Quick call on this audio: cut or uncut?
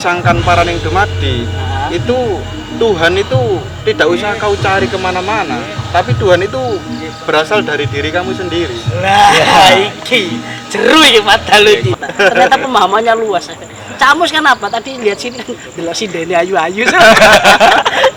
cut